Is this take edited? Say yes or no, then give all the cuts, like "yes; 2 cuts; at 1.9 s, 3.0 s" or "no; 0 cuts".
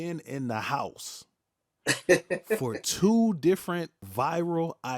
yes; 1 cut; at 4.0 s